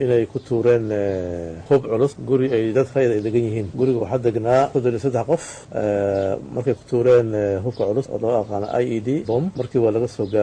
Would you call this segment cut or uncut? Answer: uncut